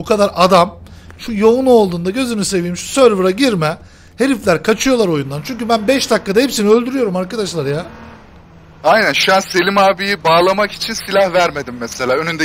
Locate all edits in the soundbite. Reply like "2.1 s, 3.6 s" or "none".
none